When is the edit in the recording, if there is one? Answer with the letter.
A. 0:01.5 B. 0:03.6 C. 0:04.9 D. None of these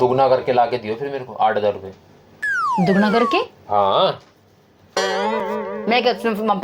D